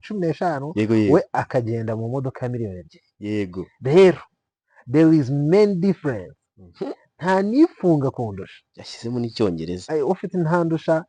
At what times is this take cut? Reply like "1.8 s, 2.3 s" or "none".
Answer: 9.8 s